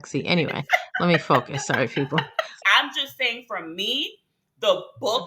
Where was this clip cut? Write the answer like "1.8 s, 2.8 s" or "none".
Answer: 2.5 s